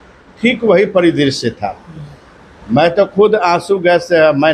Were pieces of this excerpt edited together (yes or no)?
no